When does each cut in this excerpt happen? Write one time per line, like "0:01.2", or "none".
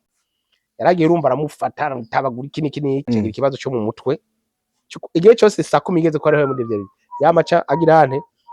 0:03.1